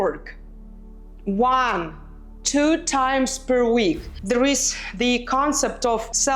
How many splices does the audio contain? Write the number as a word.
one